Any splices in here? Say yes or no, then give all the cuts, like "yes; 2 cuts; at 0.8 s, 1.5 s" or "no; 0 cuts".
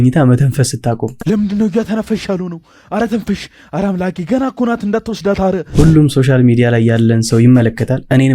yes; 1 cut; at 5.7 s